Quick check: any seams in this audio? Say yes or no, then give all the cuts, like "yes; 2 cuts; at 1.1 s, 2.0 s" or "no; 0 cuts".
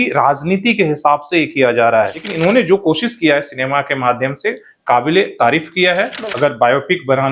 yes; 2 cuts; at 2.2 s, 6.2 s